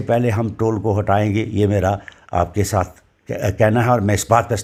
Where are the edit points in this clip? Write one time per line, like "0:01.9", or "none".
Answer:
none